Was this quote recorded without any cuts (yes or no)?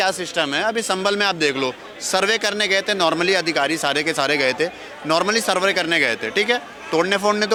yes